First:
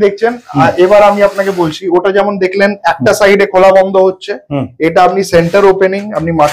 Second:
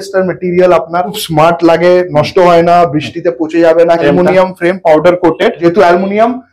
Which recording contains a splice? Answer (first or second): second